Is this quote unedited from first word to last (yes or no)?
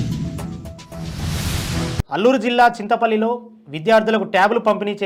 yes